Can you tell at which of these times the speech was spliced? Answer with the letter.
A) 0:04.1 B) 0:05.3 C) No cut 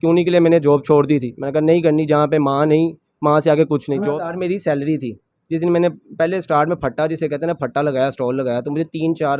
A